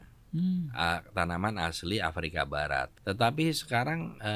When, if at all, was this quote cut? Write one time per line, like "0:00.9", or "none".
0:03.0